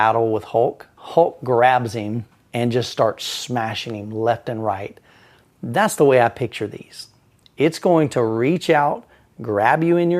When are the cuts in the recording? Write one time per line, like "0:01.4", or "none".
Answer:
0:00.9